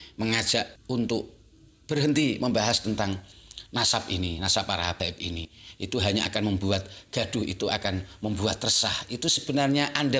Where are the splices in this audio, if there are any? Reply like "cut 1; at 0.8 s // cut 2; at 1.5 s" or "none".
none